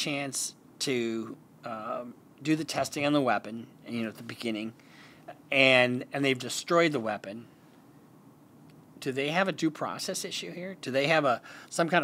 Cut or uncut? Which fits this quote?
uncut